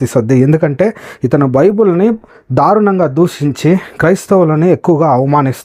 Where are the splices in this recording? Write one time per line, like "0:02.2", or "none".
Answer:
none